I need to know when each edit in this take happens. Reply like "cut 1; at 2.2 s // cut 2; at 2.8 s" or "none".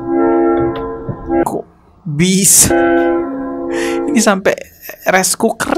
none